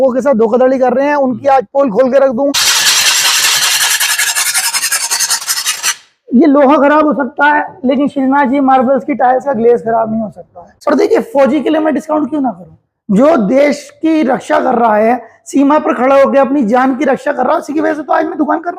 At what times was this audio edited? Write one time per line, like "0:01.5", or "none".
0:02.5
0:10.7